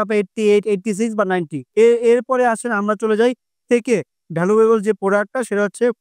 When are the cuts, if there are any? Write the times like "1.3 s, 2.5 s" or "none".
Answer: none